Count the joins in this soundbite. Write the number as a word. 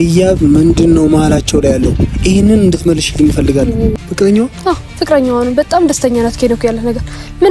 one